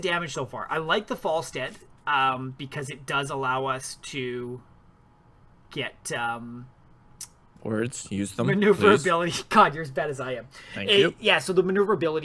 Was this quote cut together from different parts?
no; 0 cuts

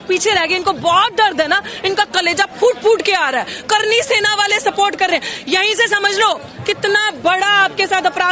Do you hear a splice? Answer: no; 0 cuts

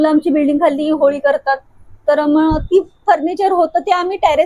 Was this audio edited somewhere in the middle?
no; 0 cuts

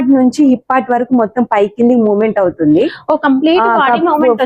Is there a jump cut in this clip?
no; 0 cuts

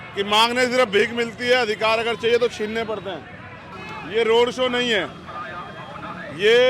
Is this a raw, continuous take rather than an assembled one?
no; 1 cut; at 3.7 s

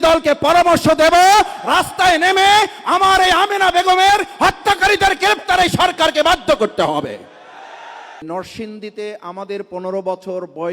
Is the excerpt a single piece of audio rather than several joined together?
no; 1 cut; at 8.2 s

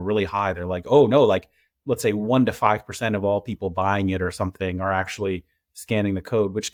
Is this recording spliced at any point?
no; 0 cuts

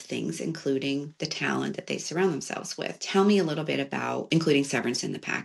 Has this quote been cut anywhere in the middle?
yes; 3 cuts; at 1.2 s, 3.0 s, 4.2 s

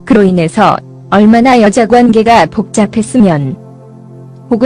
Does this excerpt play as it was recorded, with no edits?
yes; 0 cuts

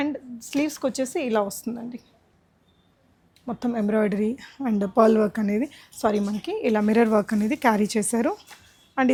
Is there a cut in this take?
no; 0 cuts

